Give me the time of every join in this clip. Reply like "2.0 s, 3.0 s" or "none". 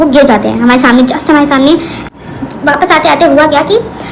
2.0 s